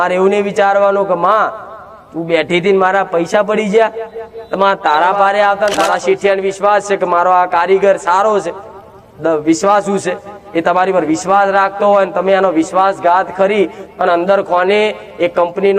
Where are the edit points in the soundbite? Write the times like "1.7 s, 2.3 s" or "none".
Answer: 5.8 s